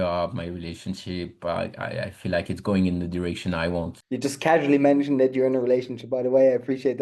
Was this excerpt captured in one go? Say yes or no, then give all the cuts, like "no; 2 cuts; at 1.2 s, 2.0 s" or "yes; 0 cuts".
yes; 0 cuts